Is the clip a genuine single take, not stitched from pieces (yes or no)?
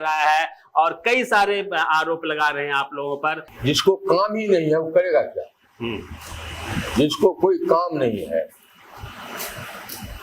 no